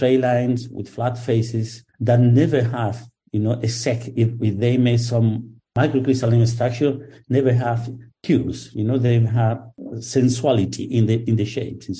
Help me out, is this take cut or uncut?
uncut